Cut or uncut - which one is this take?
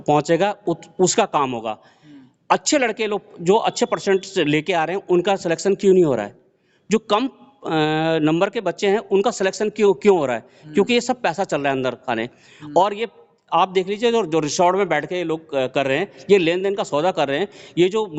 uncut